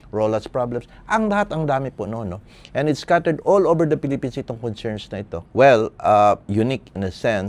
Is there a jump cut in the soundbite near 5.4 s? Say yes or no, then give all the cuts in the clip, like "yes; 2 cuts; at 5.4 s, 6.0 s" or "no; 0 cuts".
yes; 1 cut; at 5.4 s